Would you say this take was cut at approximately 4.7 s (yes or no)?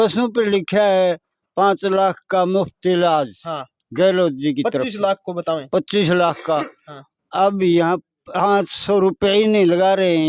no